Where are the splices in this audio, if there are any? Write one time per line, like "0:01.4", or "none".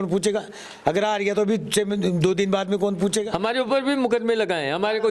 0:03.3